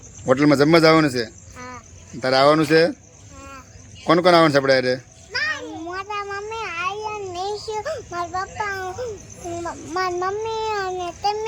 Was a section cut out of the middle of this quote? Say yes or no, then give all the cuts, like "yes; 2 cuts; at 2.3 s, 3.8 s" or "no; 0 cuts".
no; 0 cuts